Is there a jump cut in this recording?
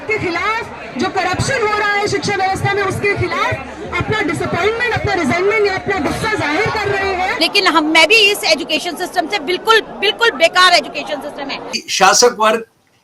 yes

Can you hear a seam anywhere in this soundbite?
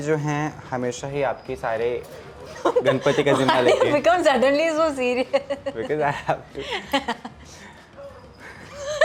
no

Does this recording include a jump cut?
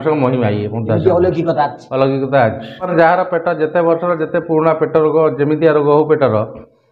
yes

